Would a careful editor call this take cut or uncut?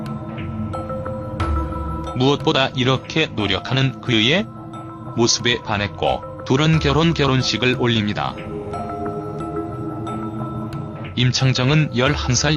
uncut